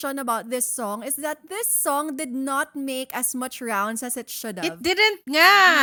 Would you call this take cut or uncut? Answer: uncut